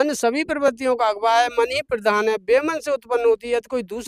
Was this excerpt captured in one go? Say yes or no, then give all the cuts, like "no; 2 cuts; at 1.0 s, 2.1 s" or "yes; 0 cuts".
yes; 0 cuts